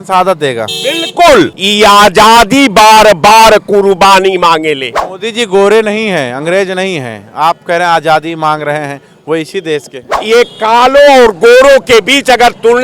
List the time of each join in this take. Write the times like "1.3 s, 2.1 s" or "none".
1.6 s, 5.0 s, 10.1 s